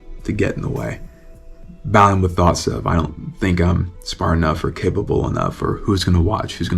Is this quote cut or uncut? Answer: uncut